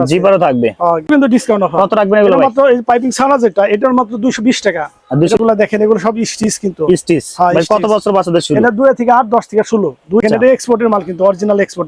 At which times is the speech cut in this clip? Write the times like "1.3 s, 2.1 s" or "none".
1.1 s, 5.4 s, 10.2 s